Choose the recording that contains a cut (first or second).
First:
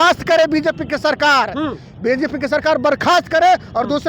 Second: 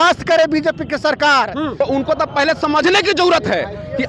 second